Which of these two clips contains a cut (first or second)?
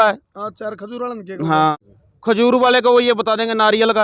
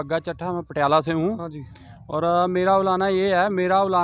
first